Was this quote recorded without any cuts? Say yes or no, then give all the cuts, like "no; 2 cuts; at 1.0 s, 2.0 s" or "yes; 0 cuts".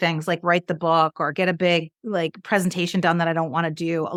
yes; 0 cuts